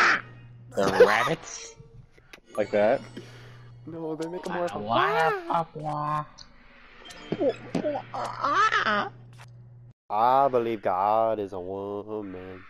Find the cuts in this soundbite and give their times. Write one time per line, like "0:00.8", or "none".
none